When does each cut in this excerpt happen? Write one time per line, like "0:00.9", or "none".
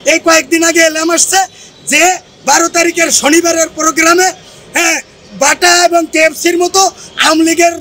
none